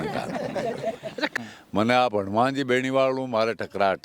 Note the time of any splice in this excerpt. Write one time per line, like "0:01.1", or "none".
0:01.3